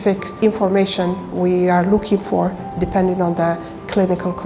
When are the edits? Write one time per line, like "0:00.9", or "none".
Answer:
none